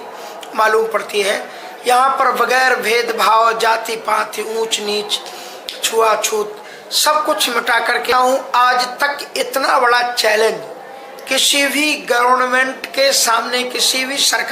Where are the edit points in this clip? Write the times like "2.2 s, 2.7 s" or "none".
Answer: 8.1 s